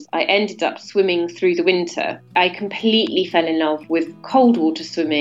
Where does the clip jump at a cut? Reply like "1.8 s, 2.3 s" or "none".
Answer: 2.3 s